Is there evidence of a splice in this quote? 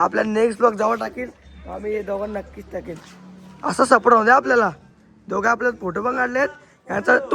no; 0 cuts

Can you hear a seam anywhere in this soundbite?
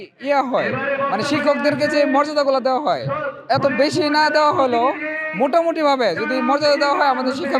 no; 0 cuts

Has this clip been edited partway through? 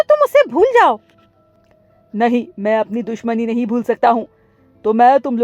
no; 0 cuts

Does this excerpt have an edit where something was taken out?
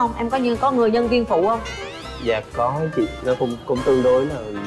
no; 0 cuts

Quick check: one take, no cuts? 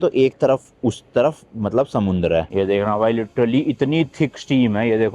no; 1 cut; at 2.5 s

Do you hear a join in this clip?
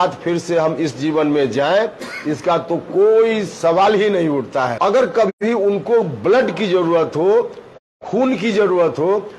yes; 1 cut; at 4.7 s

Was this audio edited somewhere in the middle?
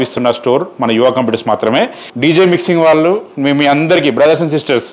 yes; 1 cut; at 2.1 s

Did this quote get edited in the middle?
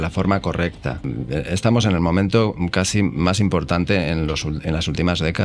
yes; 1 cut; at 1.1 s

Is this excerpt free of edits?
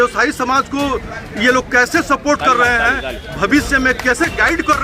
yes; 0 cuts

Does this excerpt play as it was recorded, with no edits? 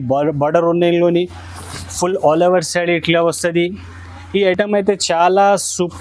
yes; 0 cuts

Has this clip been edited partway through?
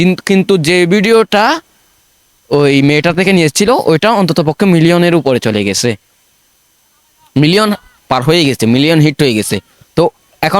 no; 0 cuts

